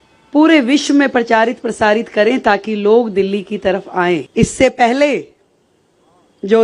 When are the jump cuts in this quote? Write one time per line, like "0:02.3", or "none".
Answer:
0:04.3